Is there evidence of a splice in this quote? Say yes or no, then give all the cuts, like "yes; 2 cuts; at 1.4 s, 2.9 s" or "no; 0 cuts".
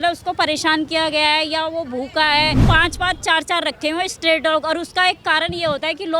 yes; 1 cut; at 2.6 s